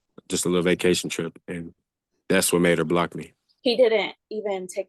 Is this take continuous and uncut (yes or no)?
no